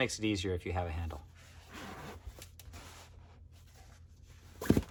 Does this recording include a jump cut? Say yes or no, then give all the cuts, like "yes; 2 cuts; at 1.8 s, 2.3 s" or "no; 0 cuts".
no; 0 cuts